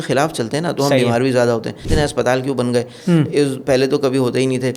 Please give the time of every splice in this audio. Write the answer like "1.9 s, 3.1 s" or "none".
1.9 s